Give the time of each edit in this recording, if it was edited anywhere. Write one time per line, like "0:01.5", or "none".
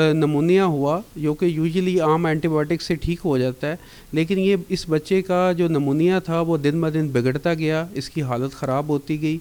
none